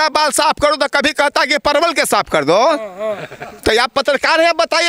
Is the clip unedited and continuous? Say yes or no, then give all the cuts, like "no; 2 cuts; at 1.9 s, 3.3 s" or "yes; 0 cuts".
yes; 0 cuts